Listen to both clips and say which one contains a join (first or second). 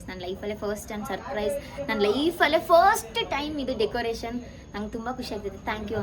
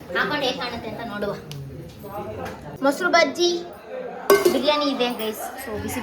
second